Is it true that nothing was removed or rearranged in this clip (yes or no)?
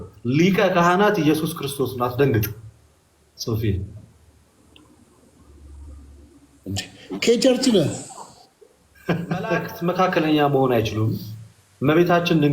no